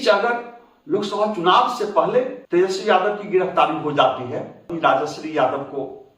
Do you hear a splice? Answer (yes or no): yes